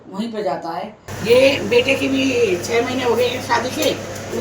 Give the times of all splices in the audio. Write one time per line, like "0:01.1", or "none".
0:01.0